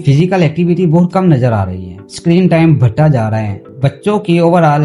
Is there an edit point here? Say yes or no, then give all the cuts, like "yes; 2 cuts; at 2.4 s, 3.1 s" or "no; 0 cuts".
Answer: no; 0 cuts